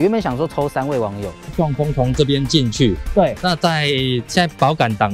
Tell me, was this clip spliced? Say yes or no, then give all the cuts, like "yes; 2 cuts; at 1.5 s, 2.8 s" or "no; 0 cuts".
yes; 1 cut; at 1.5 s